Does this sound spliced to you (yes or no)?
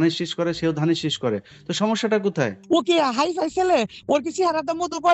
yes